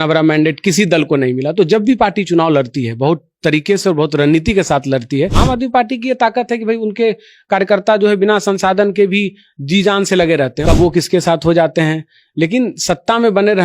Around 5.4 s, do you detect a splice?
yes; 2 cuts; at 5.4 s, 10.6 s

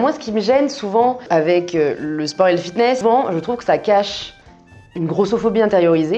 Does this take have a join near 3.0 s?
yes; 1 cut; at 3.0 s

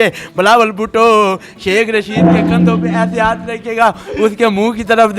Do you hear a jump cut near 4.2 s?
no; 0 cuts

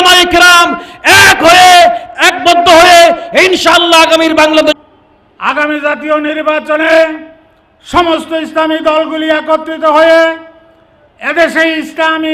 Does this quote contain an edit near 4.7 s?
yes; 1 cut; at 4.7 s

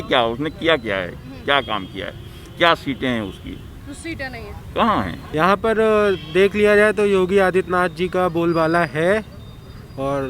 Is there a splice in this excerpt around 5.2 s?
yes; 1 cut; at 5.2 s

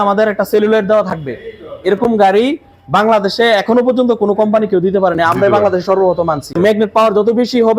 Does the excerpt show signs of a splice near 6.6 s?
yes; 1 cut; at 6.6 s

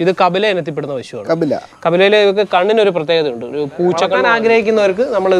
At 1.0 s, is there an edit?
no; 1 cut; at 4.3 s

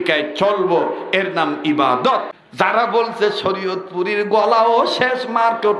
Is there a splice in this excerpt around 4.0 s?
no; 1 cut; at 2.3 s

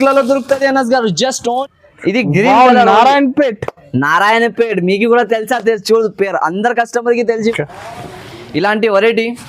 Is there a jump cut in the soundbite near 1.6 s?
yes; 2 cuts; at 1.6 s, 7.5 s

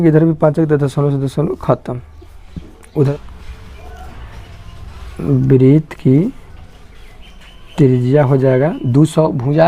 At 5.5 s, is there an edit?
no; 1 cut; at 3.1 s

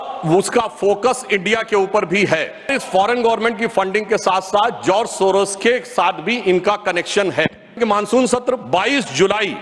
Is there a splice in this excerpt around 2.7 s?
yes; 2 cuts; at 2.7 s, 7.8 s

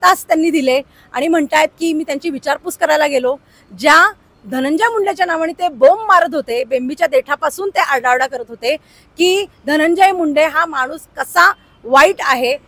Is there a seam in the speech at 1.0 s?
no; 0 cuts

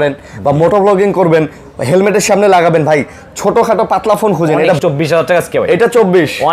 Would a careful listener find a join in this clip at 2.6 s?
no; 1 cut; at 4.8 s

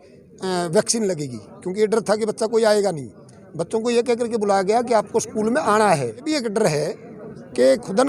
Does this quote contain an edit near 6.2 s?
yes; 1 cut; at 6.2 s

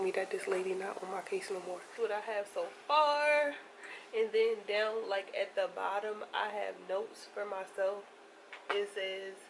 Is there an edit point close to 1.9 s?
yes; 1 cut; at 1.9 s

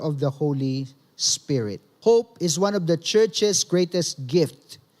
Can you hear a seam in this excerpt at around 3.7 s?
no; 1 cut; at 1.8 s

